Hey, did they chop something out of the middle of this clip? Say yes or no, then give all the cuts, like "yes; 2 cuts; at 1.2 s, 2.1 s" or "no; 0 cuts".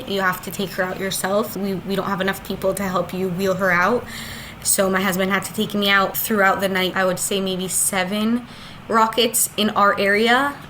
yes; 3 cuts; at 1.5 s, 6.1 s, 6.9 s